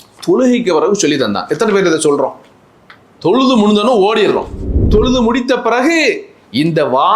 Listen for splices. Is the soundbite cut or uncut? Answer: cut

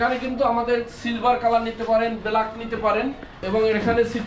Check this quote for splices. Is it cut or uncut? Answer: cut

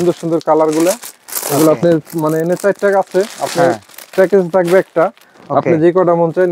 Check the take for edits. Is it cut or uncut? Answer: uncut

